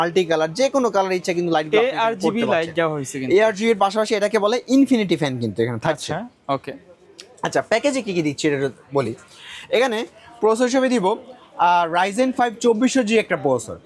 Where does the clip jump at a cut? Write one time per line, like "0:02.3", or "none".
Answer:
none

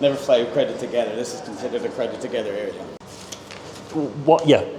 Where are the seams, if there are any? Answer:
0:03.0

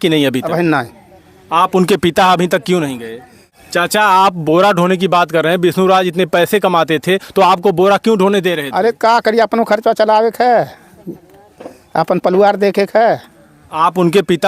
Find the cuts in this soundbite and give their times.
0:03.5

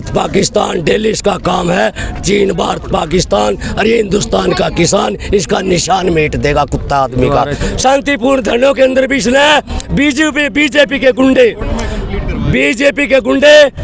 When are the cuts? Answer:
0:07.6

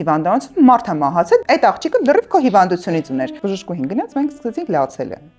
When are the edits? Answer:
0:01.4
0:03.4

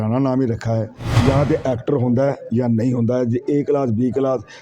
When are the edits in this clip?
0:01.0

